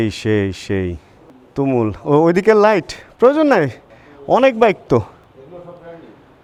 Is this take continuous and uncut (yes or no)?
yes